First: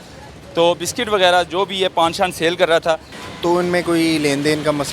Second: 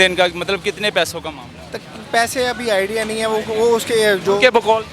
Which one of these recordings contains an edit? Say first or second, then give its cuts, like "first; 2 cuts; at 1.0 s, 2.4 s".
first; 1 cut; at 3.2 s